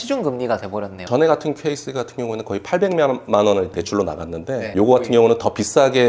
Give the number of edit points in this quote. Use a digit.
2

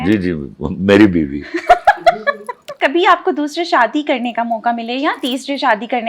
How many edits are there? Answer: 1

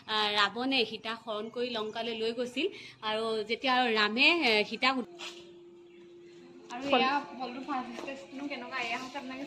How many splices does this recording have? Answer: 1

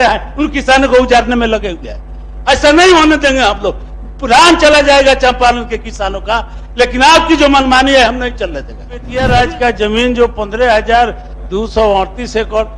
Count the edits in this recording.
1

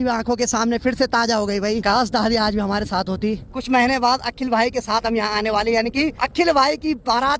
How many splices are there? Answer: 3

